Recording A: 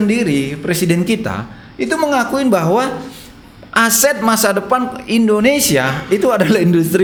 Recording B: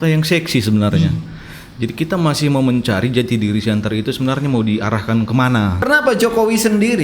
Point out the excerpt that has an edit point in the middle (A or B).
B